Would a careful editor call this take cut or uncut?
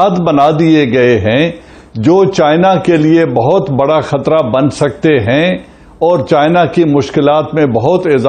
uncut